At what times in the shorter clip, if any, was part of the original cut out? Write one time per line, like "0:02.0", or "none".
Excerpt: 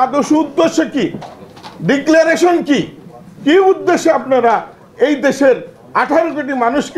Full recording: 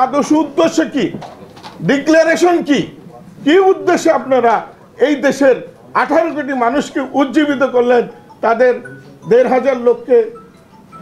none